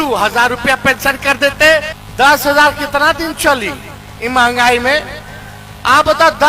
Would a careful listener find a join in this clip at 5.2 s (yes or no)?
no